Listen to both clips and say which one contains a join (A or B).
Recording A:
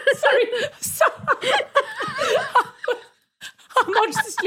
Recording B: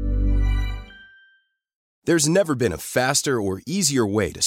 B